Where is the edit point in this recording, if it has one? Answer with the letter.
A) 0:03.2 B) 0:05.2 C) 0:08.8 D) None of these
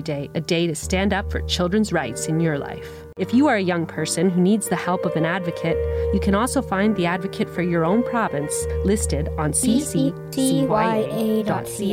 A